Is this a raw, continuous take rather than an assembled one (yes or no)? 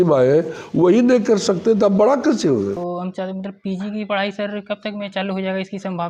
no